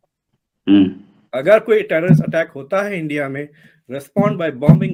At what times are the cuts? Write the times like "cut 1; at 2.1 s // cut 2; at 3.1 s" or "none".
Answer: none